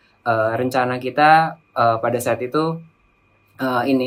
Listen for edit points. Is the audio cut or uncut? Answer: uncut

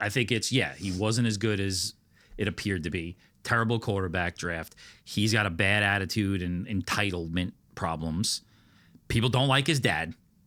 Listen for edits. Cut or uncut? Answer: uncut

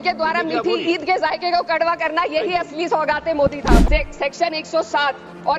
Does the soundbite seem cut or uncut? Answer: cut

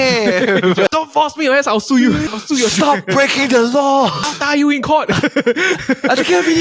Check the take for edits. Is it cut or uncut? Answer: cut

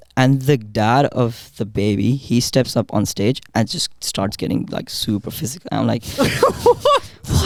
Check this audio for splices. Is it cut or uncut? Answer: uncut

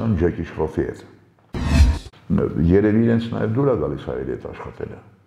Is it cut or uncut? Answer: cut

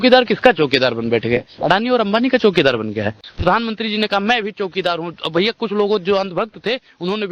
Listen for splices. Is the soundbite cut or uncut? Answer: uncut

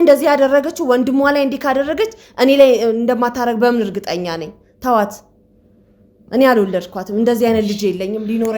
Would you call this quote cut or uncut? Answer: uncut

